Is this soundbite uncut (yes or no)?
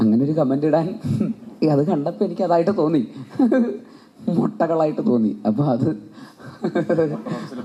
yes